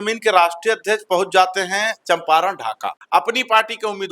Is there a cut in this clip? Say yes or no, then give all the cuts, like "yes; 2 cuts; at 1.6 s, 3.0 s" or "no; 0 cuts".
yes; 1 cut; at 2.9 s